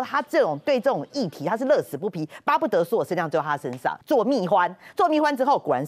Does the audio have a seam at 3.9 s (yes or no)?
yes